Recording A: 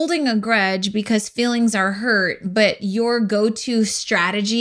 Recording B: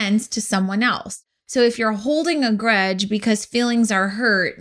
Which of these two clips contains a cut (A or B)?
B